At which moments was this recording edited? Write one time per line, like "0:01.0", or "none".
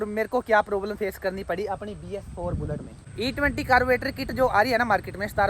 0:03.1